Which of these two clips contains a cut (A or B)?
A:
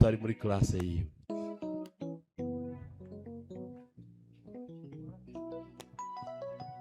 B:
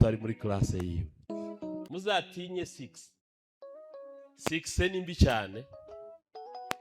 B